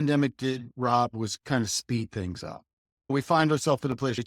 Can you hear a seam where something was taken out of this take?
yes; 1 cut; at 1.3 s

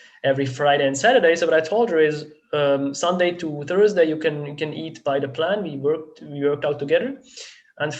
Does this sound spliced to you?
no; 0 cuts

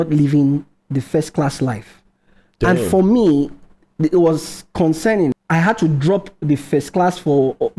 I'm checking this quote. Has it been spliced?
yes; 1 cut; at 5.4 s

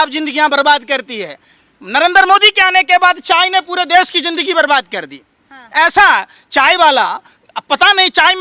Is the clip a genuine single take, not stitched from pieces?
yes; 0 cuts

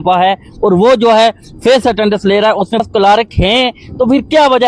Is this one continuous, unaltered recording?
no; 1 cut; at 2.8 s

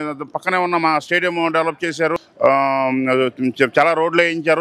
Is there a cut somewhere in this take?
yes; 1 cut; at 2.2 s

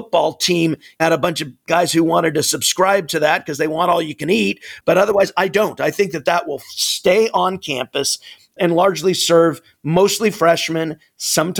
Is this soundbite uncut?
no; 1 cut; at 4.7 s

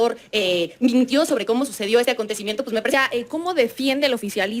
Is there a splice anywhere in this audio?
yes; 1 cut; at 2.9 s

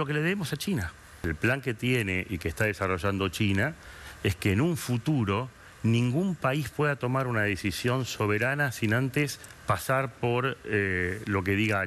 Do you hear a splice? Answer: yes; 1 cut; at 1.3 s

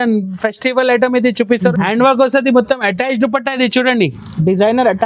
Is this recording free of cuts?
no; 1 cut; at 1.7 s

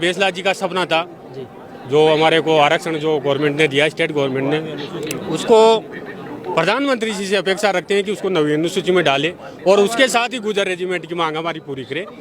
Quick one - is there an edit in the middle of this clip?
no; 0 cuts

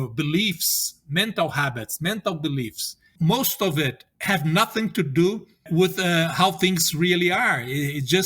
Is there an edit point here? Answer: yes; 3 cuts; at 3.1 s, 4.1 s, 5.6 s

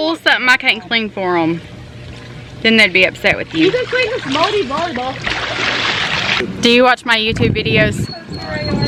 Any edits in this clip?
no; 0 cuts

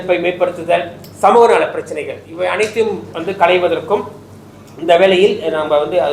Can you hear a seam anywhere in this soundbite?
no; 0 cuts

